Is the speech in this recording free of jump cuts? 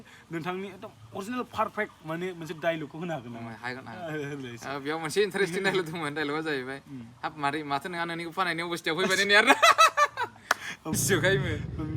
no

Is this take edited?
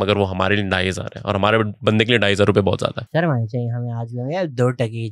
yes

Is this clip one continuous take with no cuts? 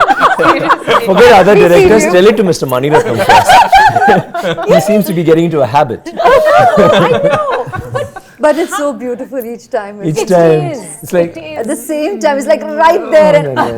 yes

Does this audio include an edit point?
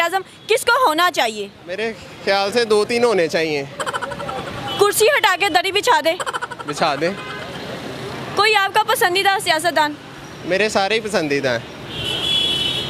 no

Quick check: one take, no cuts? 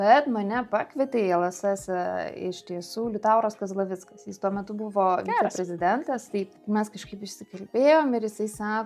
no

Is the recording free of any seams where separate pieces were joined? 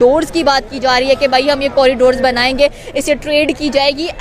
yes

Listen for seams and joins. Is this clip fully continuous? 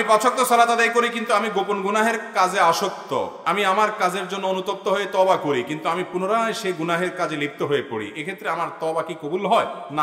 yes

